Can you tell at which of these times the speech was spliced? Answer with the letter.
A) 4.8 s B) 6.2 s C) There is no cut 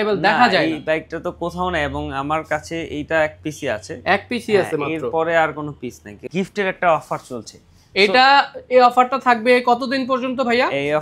B